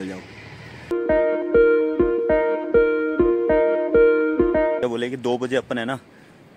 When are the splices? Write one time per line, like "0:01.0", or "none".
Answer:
0:00.9
0:04.8

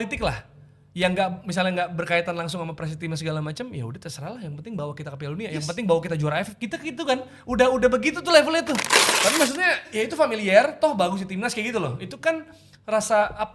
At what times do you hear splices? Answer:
0:09.0

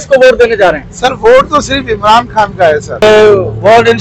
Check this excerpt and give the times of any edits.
0:03.0

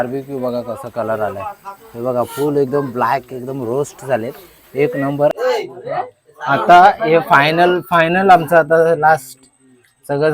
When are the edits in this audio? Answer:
0:05.3

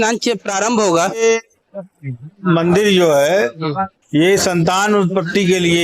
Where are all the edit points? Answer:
0:01.2

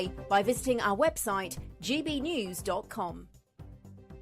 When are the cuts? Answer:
0:03.3

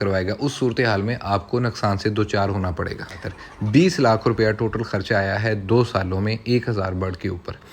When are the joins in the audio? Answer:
0:03.2

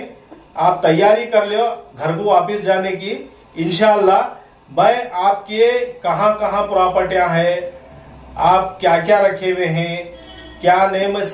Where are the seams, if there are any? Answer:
none

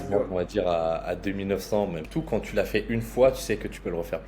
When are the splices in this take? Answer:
0:02.0

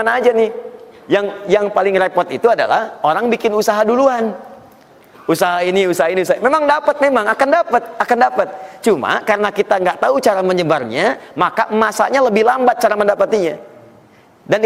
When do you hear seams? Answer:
none

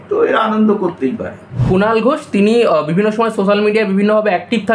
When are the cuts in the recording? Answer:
0:01.6

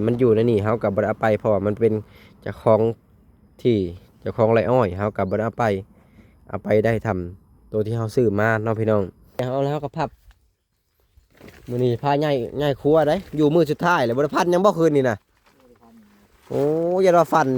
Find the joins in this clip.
0:09.4

